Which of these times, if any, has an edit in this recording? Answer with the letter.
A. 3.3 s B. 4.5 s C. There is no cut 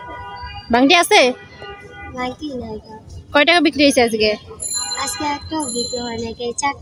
C